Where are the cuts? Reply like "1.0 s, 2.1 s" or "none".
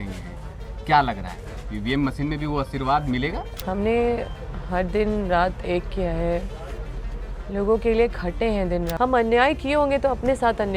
3.5 s, 8.9 s

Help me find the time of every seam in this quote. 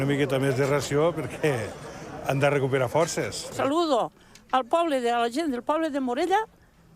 3.5 s

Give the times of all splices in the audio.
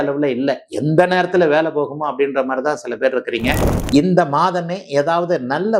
3.7 s

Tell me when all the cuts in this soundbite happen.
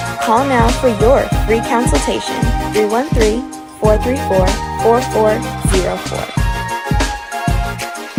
none

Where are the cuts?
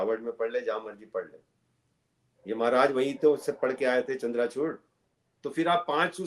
5.0 s

